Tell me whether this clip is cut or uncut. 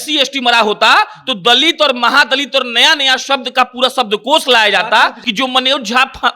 cut